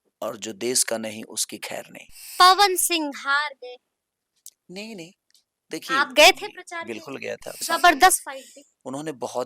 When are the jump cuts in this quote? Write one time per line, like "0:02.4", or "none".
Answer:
0:02.3
0:07.6